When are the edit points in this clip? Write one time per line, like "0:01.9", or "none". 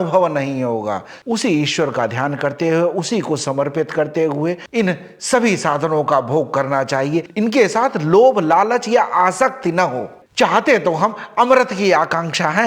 0:01.2
0:10.2